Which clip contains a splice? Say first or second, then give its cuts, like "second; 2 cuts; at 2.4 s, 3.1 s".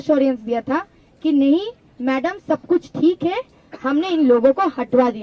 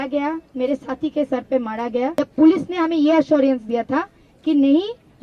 second; 1 cut; at 2.1 s